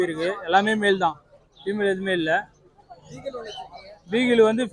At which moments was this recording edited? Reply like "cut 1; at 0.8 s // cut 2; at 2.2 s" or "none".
none